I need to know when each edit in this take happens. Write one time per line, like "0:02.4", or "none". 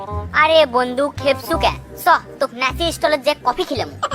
none